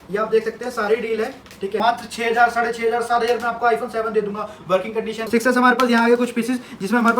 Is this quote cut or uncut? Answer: cut